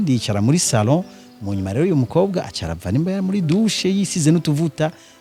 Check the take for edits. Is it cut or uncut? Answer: uncut